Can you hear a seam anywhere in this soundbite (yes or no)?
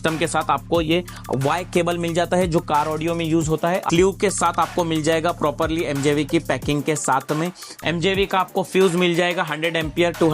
yes